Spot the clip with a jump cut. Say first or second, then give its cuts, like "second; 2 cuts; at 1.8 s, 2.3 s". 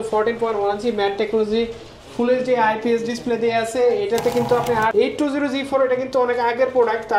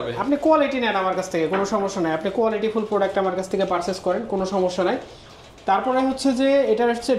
first; 1 cut; at 4.9 s